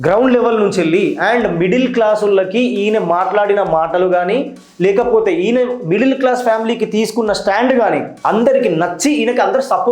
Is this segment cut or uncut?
cut